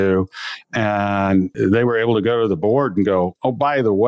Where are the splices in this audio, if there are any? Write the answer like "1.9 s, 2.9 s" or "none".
1.5 s